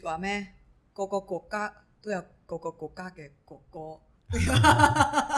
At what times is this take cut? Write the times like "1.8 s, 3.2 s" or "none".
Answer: none